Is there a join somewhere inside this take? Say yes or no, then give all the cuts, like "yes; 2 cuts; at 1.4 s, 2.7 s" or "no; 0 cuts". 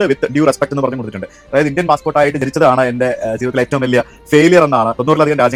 no; 0 cuts